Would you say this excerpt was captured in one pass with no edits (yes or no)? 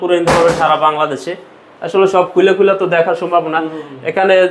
yes